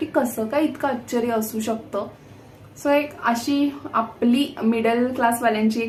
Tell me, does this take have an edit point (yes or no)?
no